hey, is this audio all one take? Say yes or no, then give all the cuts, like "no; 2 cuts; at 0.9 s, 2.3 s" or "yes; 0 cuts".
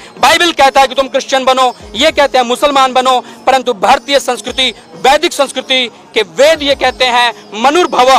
yes; 0 cuts